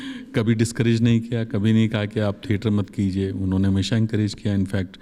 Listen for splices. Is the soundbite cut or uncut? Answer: uncut